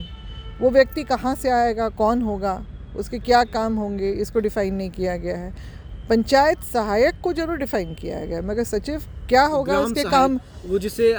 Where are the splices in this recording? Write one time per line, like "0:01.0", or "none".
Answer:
none